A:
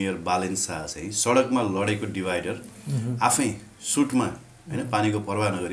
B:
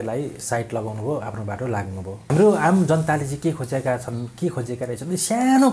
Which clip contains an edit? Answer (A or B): B